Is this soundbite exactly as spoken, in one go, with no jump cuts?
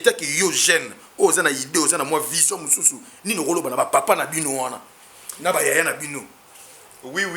yes; 0 cuts

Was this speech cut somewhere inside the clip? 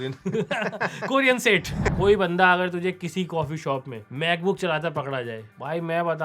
yes; 1 cut; at 1.9 s

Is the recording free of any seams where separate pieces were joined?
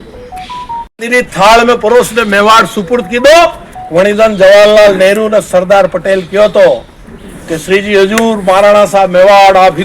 no; 1 cut; at 0.9 s

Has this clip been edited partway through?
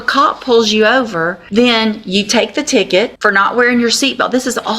yes; 2 cuts; at 1.4 s, 3.1 s

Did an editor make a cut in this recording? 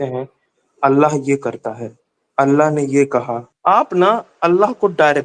yes; 1 cut; at 3.5 s

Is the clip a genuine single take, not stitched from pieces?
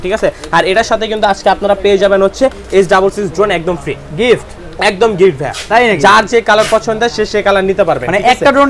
yes; 0 cuts

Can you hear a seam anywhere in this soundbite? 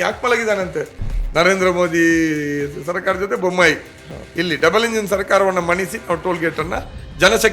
yes; 1 cut; at 1.0 s

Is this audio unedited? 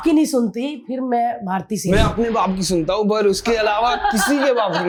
yes; 0 cuts

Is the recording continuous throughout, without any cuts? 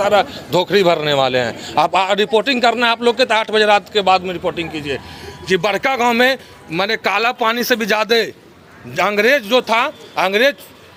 yes; 0 cuts

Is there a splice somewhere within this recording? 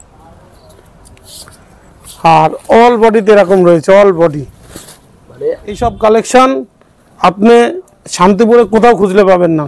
yes; 1 cut; at 5.8 s

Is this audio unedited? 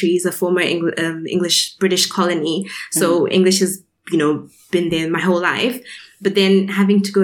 yes; 0 cuts

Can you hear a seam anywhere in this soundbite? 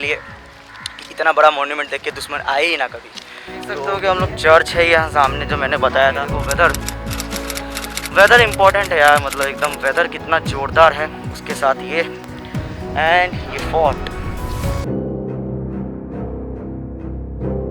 no; 0 cuts

